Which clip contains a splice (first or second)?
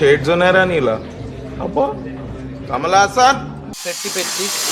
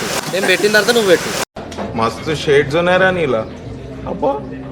first